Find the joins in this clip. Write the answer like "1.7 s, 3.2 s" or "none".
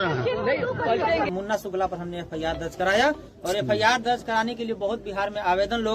1.4 s